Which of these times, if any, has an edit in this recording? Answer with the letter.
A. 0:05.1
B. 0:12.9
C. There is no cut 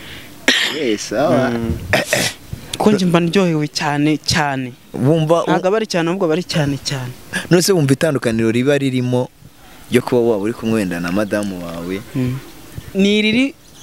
B